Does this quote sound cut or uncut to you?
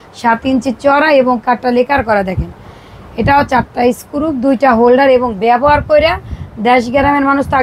uncut